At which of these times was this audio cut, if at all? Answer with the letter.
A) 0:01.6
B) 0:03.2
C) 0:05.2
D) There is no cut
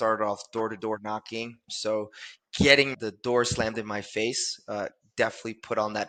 D